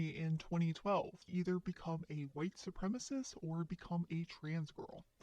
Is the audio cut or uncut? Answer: cut